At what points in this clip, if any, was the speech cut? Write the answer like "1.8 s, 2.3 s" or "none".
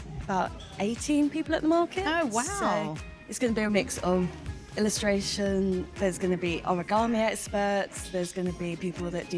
5.9 s